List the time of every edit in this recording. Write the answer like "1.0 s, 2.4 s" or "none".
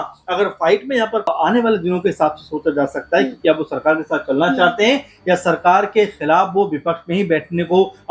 1.3 s